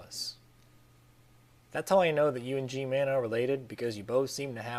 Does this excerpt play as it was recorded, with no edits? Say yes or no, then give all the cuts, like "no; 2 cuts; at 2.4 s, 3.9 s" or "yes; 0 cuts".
no; 1 cut; at 2.1 s